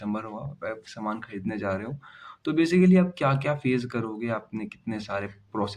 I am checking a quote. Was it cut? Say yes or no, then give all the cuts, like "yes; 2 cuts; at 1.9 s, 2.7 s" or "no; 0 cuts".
no; 0 cuts